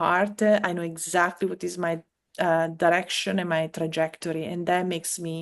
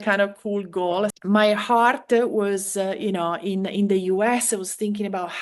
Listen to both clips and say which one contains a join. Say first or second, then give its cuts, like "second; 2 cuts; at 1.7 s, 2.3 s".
second; 1 cut; at 1.2 s